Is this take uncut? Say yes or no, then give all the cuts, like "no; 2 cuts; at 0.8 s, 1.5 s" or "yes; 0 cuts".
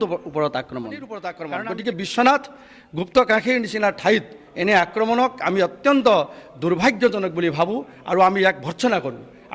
no; 1 cut; at 1.4 s